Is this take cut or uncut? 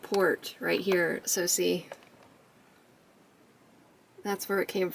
cut